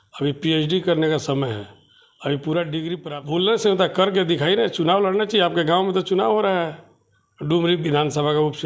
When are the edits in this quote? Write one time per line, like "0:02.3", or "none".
0:03.0